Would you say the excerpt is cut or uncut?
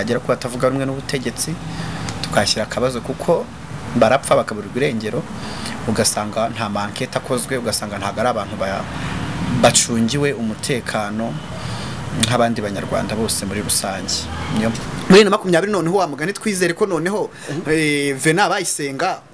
cut